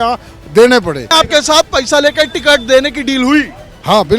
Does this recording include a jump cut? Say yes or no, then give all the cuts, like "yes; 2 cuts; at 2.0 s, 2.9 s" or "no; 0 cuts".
yes; 1 cut; at 1.1 s